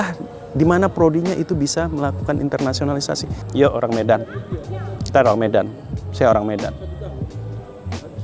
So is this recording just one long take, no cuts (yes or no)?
no